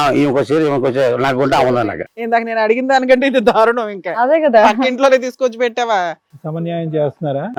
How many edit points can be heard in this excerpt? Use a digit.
0